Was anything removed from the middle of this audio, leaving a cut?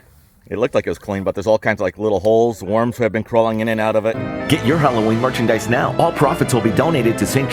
yes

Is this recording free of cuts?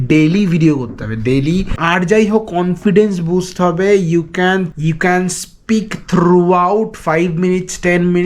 no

